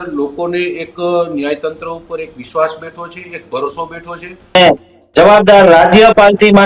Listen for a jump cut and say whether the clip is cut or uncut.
cut